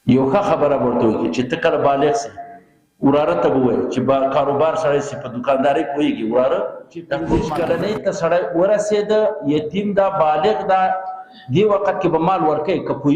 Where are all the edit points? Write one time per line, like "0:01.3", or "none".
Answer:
0:07.2